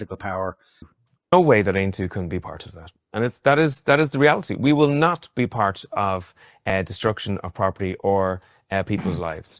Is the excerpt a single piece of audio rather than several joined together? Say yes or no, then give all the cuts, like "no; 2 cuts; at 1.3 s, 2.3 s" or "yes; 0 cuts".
no; 1 cut; at 0.9 s